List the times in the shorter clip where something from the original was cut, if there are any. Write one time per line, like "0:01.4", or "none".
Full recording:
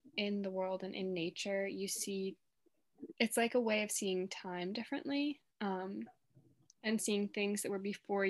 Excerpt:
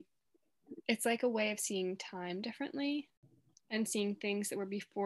0:03.2